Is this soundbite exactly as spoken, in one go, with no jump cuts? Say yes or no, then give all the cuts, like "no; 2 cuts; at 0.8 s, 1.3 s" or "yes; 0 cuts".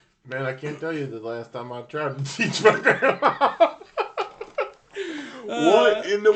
yes; 0 cuts